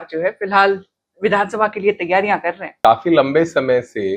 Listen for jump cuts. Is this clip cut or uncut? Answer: cut